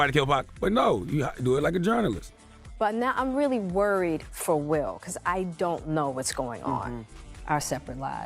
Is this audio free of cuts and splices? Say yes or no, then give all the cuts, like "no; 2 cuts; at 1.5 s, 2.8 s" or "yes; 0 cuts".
no; 1 cut; at 2.3 s